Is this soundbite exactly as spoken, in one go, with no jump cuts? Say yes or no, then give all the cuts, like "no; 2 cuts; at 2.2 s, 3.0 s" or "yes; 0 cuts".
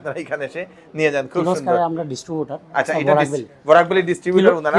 yes; 0 cuts